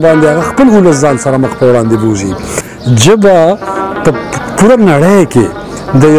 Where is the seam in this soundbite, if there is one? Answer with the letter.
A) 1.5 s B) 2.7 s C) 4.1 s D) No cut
B